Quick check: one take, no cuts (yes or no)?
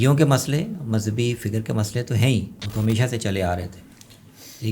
no